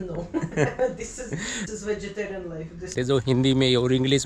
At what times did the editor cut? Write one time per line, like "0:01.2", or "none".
0:02.9